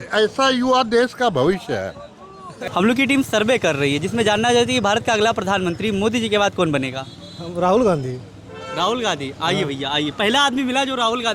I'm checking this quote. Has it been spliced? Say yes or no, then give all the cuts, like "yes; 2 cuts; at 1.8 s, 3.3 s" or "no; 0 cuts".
yes; 1 cut; at 2.6 s